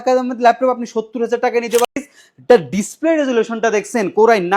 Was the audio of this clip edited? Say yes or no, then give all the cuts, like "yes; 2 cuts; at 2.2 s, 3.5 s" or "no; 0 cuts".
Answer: yes; 1 cut; at 1.8 s